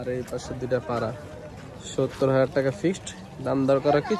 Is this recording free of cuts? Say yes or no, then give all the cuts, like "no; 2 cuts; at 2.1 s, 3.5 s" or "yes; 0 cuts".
yes; 0 cuts